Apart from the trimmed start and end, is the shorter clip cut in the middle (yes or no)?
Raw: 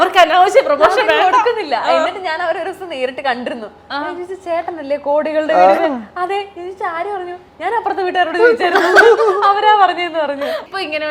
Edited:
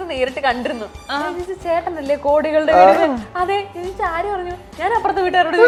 no